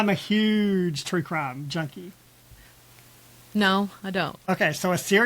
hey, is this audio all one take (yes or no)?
no